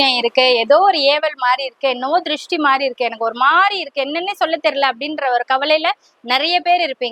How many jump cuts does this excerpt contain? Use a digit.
0